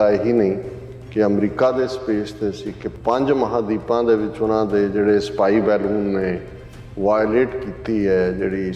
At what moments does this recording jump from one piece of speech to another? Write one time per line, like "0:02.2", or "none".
0:03.0